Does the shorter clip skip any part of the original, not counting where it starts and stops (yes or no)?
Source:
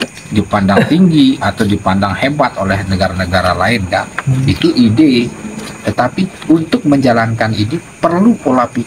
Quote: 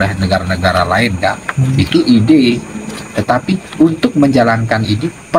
no